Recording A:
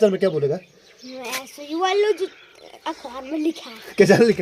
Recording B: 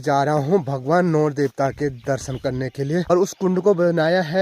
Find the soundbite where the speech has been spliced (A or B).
B